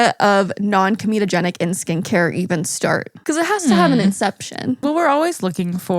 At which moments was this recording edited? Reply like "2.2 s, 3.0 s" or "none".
4.8 s